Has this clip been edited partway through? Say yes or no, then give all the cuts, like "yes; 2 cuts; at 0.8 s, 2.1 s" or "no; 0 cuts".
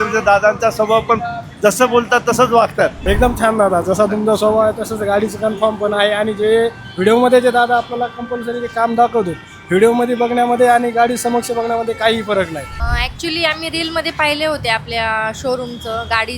yes; 2 cuts; at 3.0 s, 12.8 s